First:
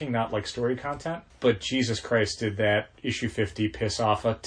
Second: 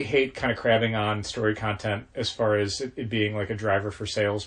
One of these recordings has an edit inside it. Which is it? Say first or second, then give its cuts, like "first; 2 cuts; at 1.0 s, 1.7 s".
first; 1 cut; at 1.3 s